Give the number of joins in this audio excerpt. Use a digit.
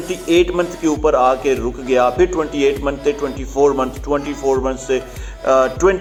0